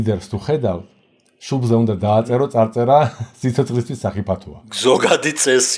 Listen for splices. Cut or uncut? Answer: cut